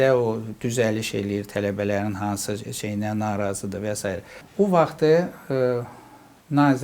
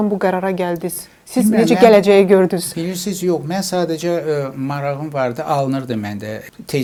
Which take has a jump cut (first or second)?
first